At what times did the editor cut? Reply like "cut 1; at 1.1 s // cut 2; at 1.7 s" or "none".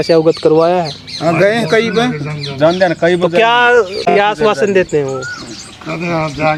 none